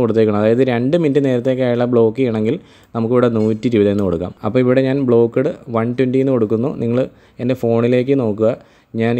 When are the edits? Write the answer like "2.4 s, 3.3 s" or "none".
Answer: 4.4 s